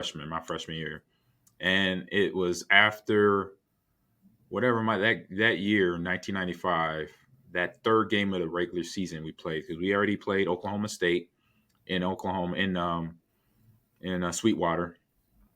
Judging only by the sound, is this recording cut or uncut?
uncut